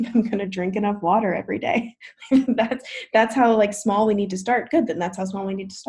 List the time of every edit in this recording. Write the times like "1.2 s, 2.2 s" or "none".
none